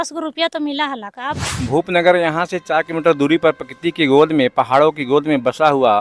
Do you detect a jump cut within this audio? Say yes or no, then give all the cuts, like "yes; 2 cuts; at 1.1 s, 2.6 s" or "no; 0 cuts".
yes; 1 cut; at 1.5 s